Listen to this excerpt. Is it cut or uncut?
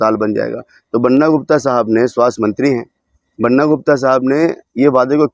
uncut